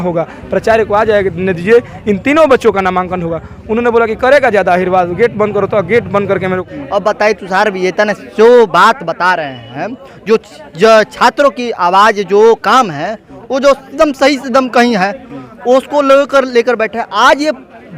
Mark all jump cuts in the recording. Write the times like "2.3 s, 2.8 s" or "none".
6.6 s